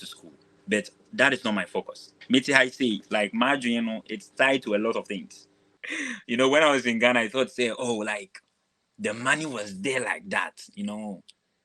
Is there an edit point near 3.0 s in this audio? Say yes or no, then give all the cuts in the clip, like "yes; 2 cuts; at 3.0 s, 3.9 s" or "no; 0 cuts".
no; 1 cut; at 5.8 s